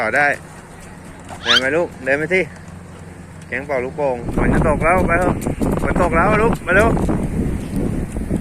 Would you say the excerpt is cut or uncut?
cut